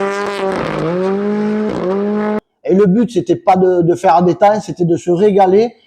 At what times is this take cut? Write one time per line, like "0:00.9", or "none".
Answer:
0:02.4